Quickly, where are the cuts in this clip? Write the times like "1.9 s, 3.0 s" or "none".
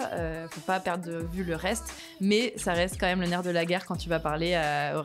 none